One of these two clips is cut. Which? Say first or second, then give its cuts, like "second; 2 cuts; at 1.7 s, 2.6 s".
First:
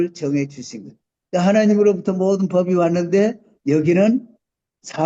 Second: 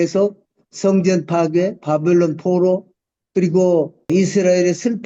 second; 1 cut; at 4.1 s